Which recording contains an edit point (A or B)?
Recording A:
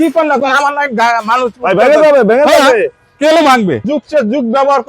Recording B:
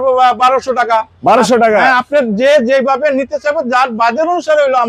A